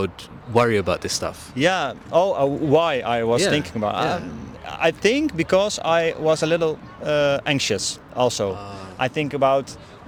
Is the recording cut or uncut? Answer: uncut